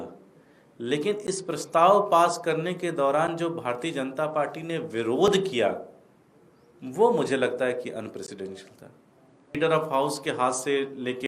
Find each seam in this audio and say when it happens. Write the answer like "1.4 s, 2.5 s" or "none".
9.6 s